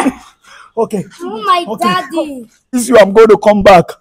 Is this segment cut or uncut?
cut